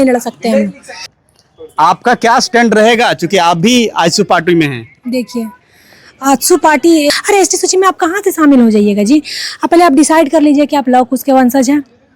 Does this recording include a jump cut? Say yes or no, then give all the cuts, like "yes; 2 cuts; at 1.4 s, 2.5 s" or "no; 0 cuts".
yes; 2 cuts; at 1.1 s, 7.1 s